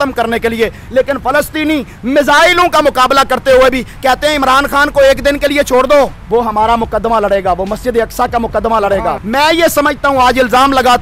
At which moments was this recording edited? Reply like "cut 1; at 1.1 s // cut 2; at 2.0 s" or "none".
cut 1; at 6.2 s // cut 2; at 9.2 s